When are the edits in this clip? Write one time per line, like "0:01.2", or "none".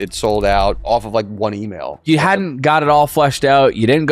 0:00.8
0:02.0